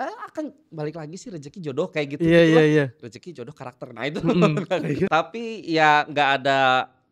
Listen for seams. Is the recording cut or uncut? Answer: cut